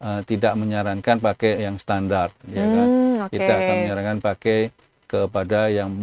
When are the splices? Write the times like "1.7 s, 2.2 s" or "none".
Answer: none